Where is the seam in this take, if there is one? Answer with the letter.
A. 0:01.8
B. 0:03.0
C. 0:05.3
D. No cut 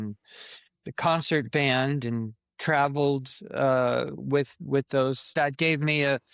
C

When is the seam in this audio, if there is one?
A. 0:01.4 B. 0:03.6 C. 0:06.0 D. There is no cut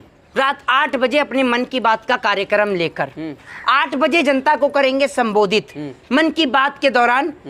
D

